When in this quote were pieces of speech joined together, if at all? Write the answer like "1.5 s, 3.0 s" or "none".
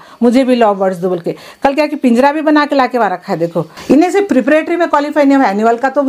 3.7 s